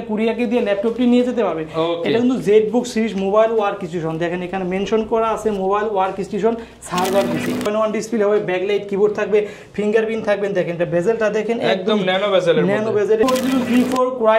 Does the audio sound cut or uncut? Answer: cut